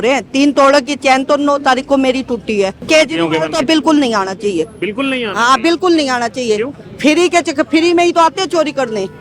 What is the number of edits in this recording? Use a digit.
1